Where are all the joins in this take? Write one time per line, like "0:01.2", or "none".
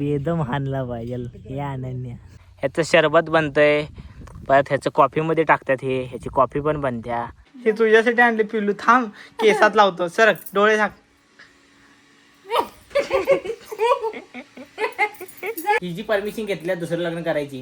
0:02.2
0:07.4
0:15.8